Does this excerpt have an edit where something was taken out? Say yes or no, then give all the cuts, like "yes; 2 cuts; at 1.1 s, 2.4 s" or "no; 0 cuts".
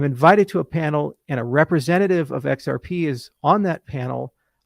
no; 0 cuts